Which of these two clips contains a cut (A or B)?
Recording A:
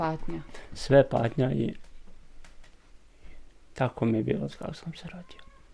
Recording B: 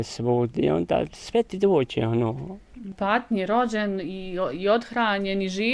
B